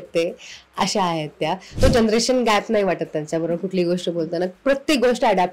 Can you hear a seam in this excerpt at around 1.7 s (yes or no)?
yes